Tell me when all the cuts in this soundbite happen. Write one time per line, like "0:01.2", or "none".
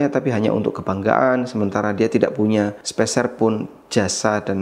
0:02.8